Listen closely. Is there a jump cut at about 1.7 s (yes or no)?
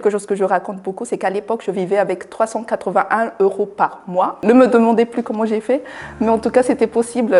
no